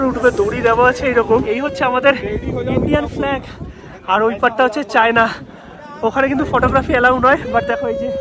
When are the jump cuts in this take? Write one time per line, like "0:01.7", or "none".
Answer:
0:01.5